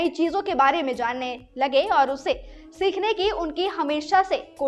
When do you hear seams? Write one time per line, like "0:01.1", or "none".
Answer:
none